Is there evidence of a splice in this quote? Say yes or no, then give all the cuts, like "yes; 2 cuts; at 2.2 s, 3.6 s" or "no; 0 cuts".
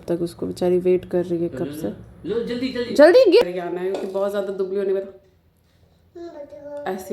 yes; 1 cut; at 3.4 s